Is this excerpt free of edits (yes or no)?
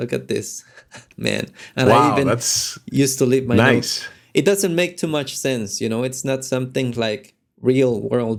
yes